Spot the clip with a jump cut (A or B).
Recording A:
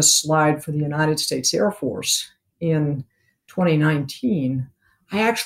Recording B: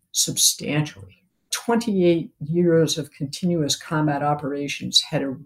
B